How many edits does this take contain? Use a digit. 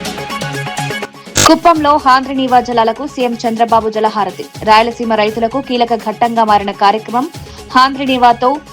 1